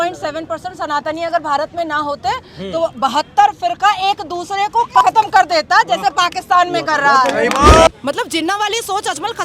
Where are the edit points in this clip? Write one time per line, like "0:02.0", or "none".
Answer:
0:07.9